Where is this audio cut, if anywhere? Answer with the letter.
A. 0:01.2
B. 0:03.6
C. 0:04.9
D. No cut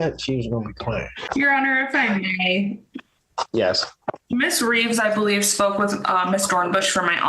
A